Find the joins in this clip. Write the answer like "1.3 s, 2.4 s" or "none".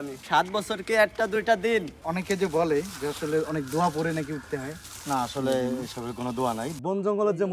2.0 s, 6.7 s